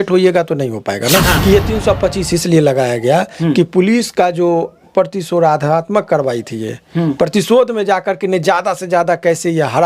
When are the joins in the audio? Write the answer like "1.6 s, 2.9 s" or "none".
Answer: 1.3 s